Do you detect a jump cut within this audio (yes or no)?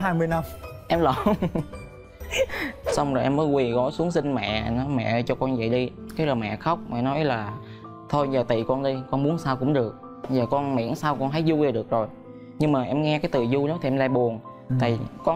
yes